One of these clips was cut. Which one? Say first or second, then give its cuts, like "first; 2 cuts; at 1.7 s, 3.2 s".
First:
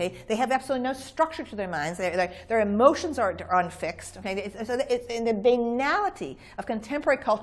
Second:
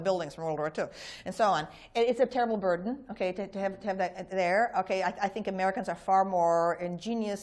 first; 1 cut; at 4.2 s